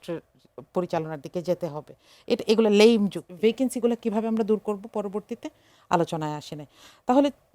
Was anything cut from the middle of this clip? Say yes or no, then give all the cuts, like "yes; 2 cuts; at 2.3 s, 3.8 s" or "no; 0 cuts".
yes; 1 cut; at 3.2 s